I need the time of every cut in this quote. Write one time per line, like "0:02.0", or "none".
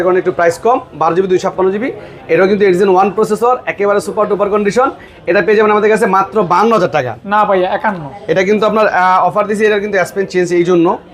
none